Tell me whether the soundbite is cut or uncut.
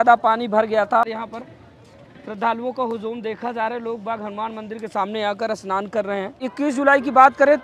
cut